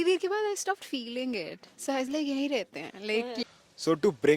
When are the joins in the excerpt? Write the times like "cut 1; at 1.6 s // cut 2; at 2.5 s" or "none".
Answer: cut 1; at 3.4 s